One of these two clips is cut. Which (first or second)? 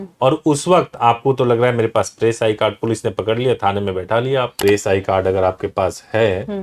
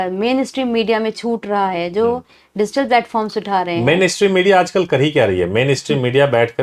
first